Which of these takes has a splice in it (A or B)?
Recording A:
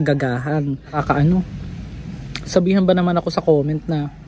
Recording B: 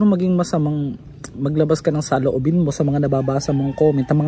A